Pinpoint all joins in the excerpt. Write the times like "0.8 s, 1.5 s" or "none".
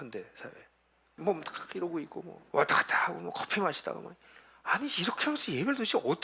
1.2 s, 2.4 s